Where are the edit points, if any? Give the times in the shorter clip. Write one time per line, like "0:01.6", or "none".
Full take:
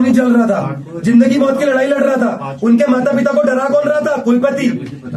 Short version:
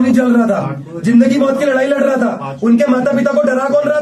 none